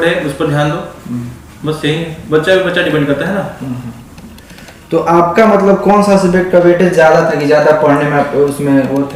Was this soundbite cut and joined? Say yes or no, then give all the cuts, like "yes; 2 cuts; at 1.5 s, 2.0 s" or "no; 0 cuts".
no; 0 cuts